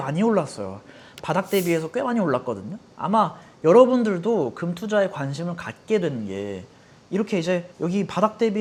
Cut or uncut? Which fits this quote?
uncut